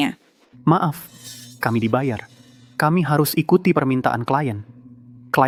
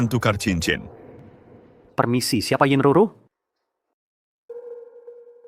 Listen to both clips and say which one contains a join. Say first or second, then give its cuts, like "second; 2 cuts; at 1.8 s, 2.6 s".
second; 1 cut; at 4.5 s